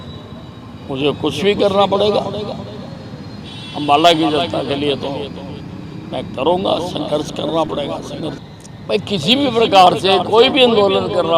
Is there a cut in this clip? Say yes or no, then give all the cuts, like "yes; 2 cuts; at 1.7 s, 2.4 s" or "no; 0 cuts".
yes; 1 cut; at 8.4 s